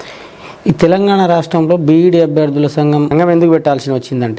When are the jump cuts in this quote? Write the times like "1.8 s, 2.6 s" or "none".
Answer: 3.1 s